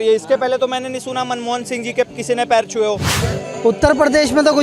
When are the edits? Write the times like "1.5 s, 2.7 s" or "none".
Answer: 3.1 s